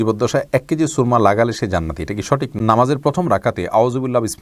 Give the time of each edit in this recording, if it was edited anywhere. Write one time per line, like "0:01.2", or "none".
0:02.5